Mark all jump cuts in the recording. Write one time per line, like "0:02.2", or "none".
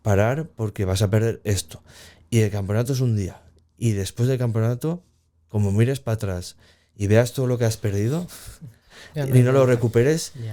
none